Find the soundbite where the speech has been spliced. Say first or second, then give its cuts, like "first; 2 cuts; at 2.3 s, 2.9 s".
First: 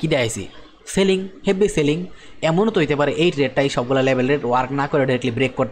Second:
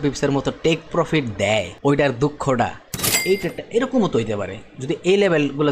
second; 2 cuts; at 1.7 s, 3.1 s